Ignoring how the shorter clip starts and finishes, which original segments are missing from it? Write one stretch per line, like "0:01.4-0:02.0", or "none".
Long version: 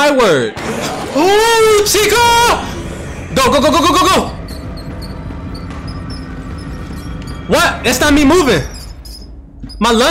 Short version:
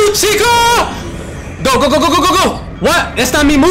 0:04.4-0:07.3